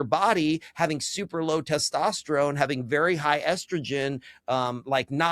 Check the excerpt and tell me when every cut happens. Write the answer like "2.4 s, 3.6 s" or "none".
none